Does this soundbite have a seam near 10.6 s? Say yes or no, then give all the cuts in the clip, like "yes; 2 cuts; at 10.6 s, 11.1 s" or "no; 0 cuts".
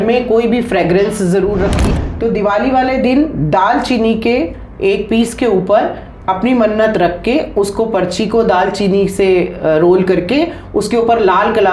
no; 1 cut; at 1.9 s